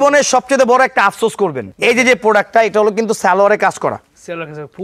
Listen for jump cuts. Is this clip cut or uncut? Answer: uncut